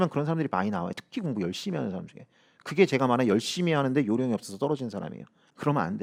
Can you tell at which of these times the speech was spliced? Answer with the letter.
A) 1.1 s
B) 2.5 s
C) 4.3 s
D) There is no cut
D